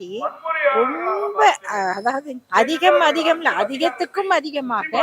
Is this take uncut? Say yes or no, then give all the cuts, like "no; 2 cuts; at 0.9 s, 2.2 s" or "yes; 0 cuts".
no; 1 cut; at 2.3 s